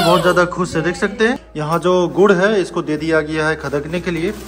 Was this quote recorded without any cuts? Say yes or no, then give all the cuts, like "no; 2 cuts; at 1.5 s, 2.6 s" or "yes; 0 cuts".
no; 1 cut; at 1.5 s